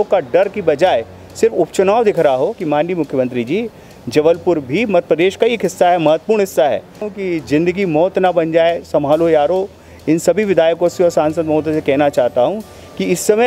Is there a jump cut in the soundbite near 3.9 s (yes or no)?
no